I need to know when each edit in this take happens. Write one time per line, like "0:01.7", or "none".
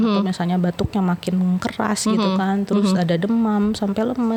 none